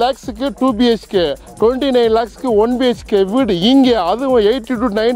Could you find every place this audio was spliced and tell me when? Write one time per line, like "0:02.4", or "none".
none